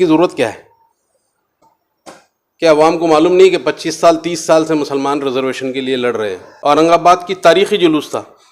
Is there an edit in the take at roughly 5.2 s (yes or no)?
no